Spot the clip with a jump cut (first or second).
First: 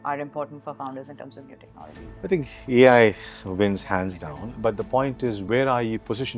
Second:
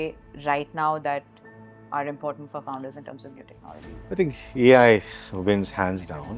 first